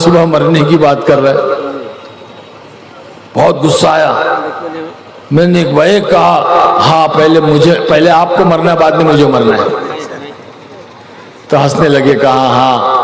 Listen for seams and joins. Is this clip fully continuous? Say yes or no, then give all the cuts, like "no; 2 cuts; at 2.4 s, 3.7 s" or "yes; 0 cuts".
yes; 0 cuts